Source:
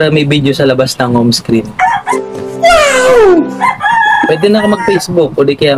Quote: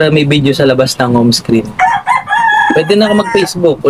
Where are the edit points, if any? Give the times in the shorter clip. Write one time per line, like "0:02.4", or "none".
0:02.1